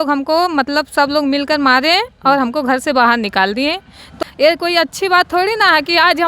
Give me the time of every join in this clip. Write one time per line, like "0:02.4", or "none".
0:04.1